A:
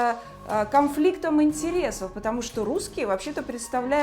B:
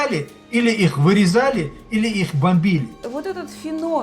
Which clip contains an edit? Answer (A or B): B